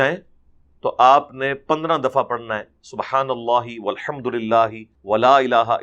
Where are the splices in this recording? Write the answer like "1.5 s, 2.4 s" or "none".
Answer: 4.9 s